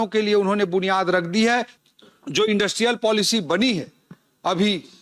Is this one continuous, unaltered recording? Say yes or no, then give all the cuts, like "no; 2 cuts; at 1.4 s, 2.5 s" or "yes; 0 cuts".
no; 1 cut; at 1.8 s